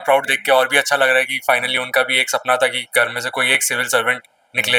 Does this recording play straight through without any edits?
yes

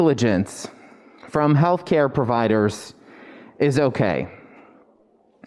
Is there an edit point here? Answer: no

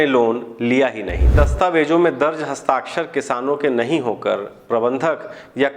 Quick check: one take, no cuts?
no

